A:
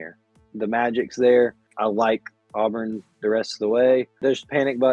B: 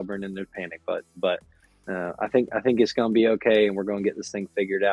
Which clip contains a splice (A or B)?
A